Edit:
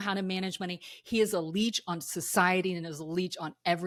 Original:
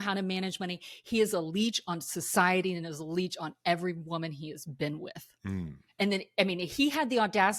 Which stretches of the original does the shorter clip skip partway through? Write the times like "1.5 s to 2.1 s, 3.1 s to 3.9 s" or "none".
none